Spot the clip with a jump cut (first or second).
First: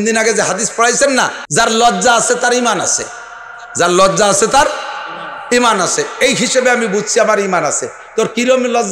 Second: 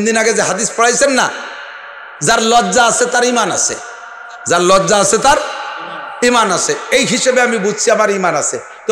first